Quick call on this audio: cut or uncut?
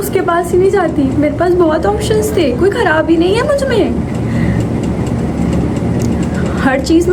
uncut